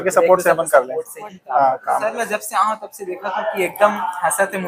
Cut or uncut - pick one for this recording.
cut